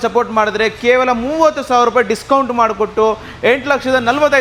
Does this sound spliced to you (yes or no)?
no